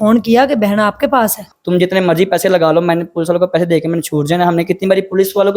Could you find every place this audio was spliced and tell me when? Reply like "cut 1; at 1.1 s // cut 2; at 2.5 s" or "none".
cut 1; at 1.5 s